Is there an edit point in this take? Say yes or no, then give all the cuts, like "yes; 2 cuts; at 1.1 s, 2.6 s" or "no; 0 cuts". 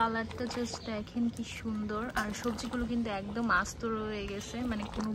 no; 0 cuts